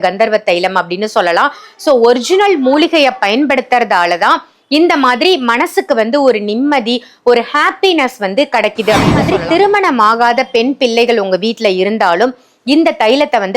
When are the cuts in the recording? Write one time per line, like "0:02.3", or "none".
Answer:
0:09.1